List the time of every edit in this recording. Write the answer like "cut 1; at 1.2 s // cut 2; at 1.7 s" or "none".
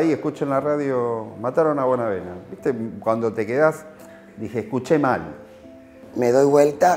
cut 1; at 6.0 s